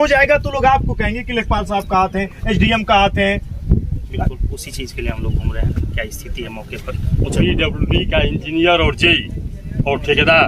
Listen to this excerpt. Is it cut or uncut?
cut